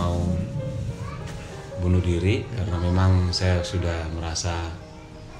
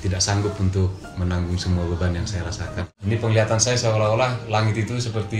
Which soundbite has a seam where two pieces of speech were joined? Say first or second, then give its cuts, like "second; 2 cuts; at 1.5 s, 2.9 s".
second; 1 cut; at 2.9 s